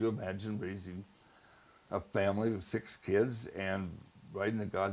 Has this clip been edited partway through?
no; 0 cuts

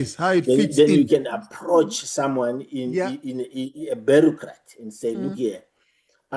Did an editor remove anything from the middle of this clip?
no; 0 cuts

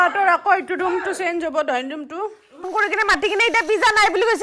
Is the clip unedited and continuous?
no; 1 cut; at 2.7 s

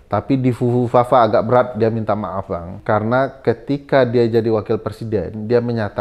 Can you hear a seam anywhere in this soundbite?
yes; 1 cut; at 2.7 s

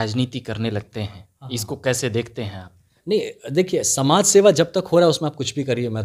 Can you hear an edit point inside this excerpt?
no; 0 cuts

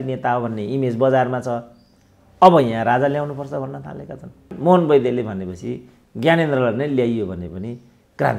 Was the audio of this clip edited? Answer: yes; 1 cut; at 4.5 s

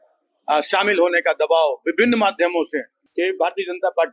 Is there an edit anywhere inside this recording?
yes; 1 cut; at 3.0 s

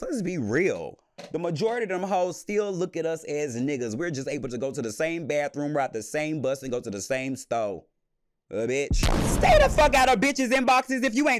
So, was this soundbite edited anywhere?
yes; 1 cut; at 9.3 s

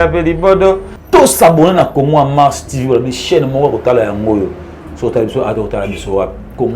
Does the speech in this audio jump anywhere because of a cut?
yes; 1 cut; at 0.9 s

